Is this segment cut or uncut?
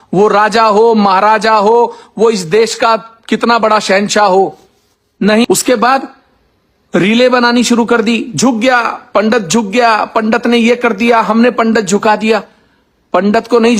cut